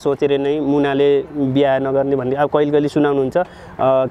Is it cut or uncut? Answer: uncut